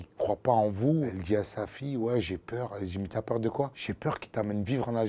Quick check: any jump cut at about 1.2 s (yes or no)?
yes